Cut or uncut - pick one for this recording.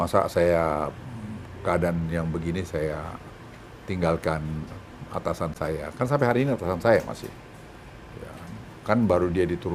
uncut